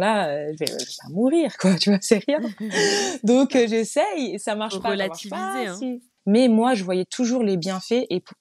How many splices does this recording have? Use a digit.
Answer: 1